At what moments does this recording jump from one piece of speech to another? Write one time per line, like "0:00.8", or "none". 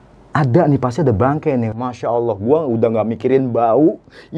0:01.7